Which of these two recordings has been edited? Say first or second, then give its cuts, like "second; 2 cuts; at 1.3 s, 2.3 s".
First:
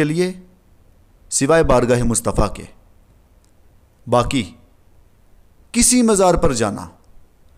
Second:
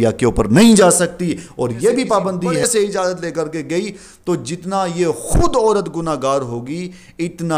second; 1 cut; at 2.6 s